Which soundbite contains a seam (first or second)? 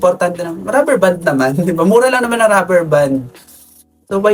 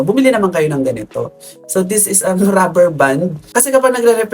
second